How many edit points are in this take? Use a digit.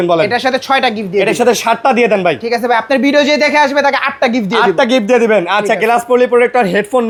0